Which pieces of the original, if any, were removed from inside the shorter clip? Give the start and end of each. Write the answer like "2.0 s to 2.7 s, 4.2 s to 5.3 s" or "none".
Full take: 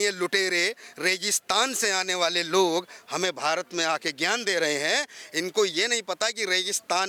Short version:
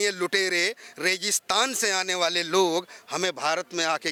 none